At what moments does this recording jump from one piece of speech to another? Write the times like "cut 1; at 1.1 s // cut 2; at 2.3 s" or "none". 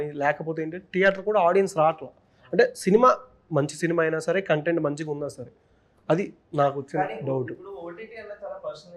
none

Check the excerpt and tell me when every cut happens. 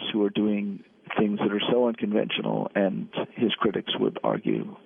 none

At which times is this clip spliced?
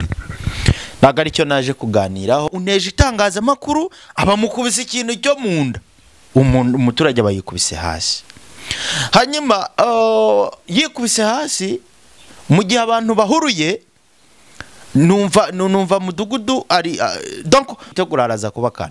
cut 1; at 2.5 s // cut 2; at 17.9 s

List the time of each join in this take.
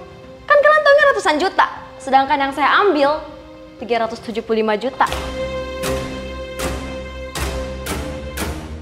none

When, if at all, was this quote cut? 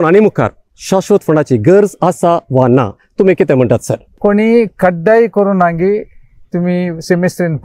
cut 1; at 4.2 s

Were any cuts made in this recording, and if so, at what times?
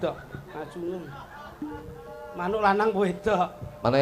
none

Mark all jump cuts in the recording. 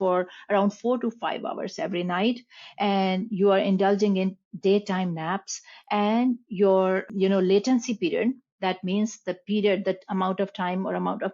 cut 1; at 7.1 s

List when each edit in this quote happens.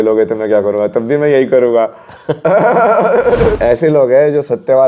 cut 1; at 3.6 s

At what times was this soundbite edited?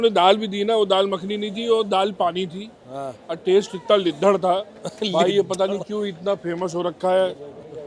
none

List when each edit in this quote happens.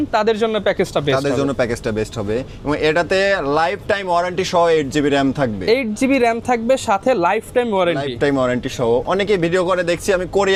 none

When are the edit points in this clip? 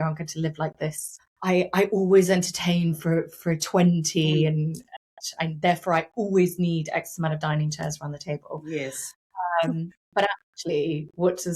cut 1; at 1.1 s

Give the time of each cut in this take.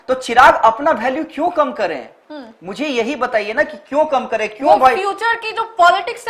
none

